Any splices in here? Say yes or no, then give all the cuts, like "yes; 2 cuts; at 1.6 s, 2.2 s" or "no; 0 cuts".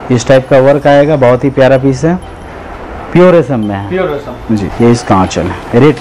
yes; 1 cut; at 4.7 s